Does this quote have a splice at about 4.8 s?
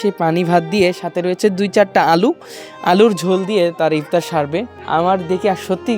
yes; 1 cut; at 4.8 s

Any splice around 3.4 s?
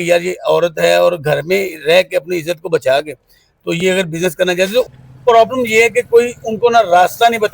no; 1 cut; at 4.9 s

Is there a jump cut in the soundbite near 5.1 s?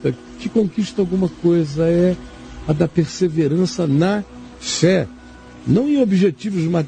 no; 1 cut; at 2.2 s

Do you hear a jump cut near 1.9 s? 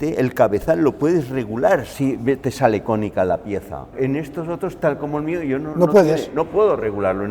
yes; 2 cuts; at 1.9 s, 3.9 s

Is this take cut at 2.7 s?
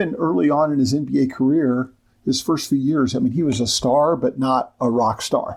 no; 0 cuts

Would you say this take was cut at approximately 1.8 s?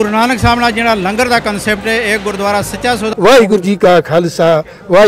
no; 1 cut; at 3.2 s

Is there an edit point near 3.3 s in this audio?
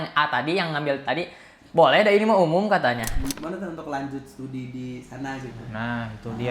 yes; 1 cut; at 3.3 s

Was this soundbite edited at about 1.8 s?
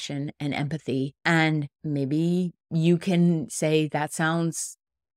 yes; 3 cuts; at 1.2 s, 1.8 s, 2.6 s

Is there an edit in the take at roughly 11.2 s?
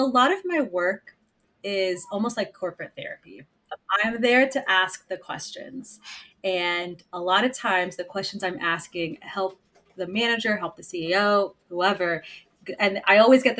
no; 1 cut; at 3.8 s

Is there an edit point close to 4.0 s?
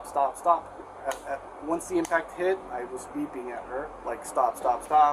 yes; 1 cut; at 4.0 s

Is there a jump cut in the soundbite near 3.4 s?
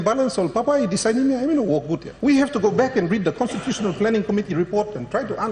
no; 1 cut; at 2.1 s

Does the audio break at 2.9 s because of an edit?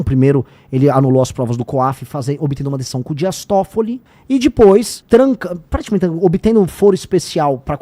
no; 2 cuts; at 4.1 s, 4.9 s

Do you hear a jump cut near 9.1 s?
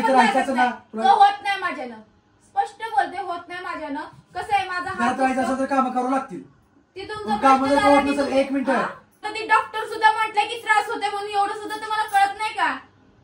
yes; 1 cut; at 9.1 s

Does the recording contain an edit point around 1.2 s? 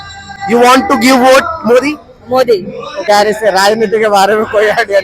no; 1 cut; at 3.1 s

